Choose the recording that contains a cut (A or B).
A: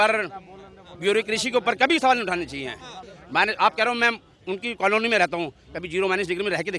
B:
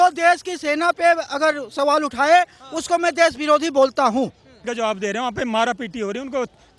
B